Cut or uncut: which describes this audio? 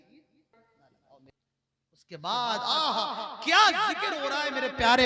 cut